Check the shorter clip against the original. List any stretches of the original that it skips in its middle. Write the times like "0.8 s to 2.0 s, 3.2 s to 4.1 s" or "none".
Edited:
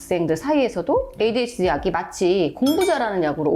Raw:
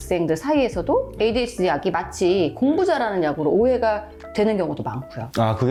none